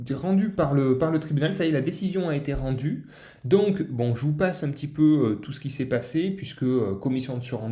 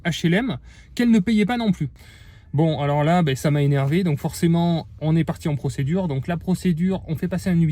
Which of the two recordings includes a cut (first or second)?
second